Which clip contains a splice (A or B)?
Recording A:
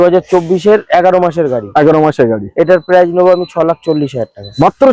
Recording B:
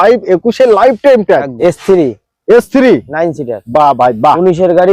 B